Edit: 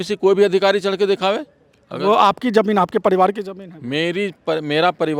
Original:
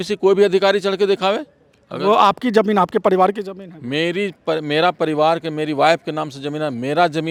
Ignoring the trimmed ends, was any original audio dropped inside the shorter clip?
no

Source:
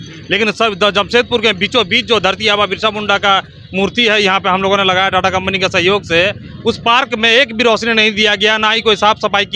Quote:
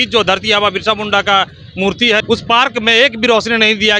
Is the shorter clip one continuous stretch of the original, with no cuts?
no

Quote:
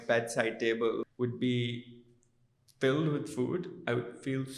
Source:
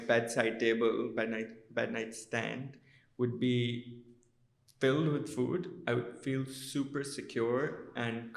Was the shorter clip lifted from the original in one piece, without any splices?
no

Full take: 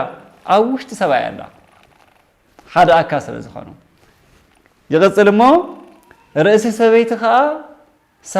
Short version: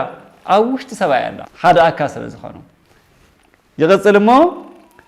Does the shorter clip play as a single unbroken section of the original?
no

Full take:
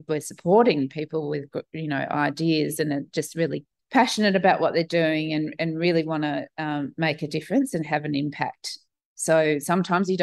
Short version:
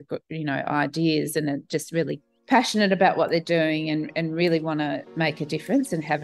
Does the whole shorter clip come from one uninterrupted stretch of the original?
no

